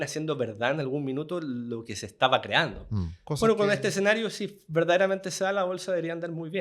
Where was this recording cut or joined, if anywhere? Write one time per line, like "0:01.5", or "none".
0:03.2